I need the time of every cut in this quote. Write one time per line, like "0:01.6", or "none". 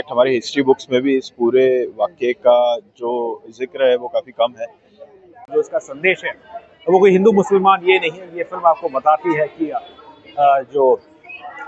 0:05.5